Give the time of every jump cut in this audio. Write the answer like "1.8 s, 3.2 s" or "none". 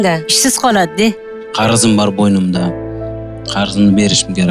1.4 s